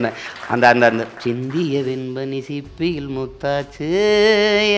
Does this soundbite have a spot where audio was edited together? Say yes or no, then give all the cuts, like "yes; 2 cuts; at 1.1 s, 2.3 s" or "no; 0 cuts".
no; 0 cuts